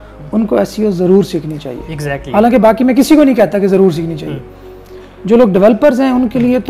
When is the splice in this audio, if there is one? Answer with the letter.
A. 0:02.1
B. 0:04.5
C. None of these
C